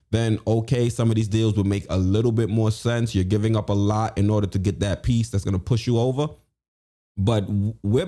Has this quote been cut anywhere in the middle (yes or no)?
no